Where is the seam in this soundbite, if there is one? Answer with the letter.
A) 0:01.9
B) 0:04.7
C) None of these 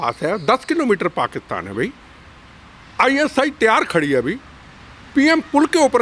C